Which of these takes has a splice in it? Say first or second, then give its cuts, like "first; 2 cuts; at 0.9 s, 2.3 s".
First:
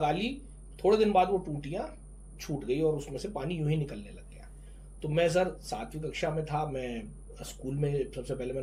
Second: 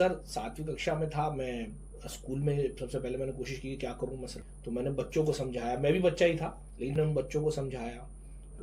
second; 2 cuts; at 4.4 s, 6.9 s